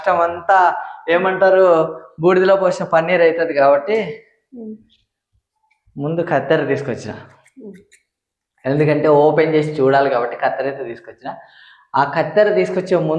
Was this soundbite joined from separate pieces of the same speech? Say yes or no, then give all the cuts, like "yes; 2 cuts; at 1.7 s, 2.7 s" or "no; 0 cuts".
no; 0 cuts